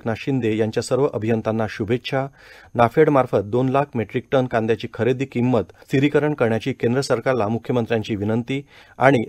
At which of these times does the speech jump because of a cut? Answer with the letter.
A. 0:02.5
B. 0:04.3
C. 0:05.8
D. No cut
C